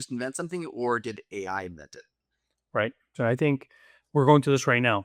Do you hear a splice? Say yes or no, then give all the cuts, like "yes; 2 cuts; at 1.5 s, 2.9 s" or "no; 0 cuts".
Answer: yes; 1 cut; at 3.1 s